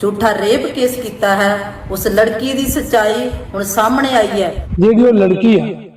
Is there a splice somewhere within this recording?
yes; 1 cut; at 4.6 s

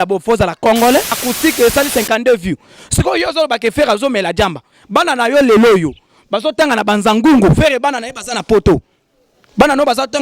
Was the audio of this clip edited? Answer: yes; 1 cut; at 1.2 s

